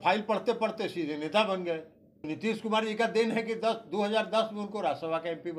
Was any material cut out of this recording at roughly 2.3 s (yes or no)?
yes